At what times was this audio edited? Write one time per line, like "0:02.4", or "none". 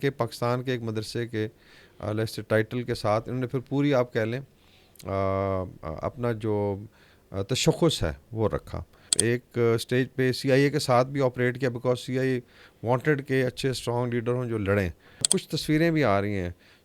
0:09.1
0:15.3